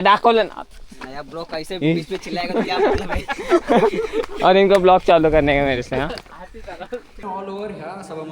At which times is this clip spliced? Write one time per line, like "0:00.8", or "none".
0:07.2